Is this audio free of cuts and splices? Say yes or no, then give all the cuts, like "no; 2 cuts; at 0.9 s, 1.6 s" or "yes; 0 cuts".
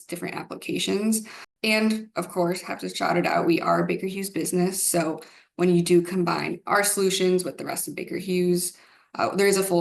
no; 1 cut; at 1.5 s